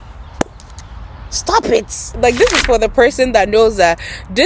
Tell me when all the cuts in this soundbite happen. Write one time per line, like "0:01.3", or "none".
0:02.1